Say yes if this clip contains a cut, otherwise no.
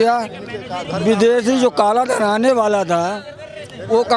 no